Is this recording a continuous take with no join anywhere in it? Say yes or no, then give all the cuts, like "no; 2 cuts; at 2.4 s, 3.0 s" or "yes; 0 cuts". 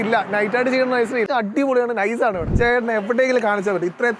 no; 2 cuts; at 1.3 s, 2.5 s